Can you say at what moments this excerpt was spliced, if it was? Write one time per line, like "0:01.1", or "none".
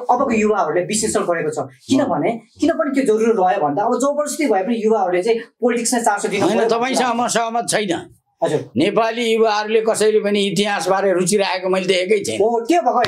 none